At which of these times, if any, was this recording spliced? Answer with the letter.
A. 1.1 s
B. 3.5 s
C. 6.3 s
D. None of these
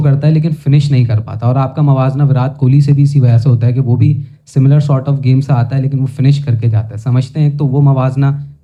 D